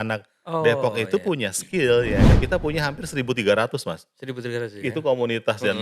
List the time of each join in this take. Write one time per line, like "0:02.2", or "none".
0:02.3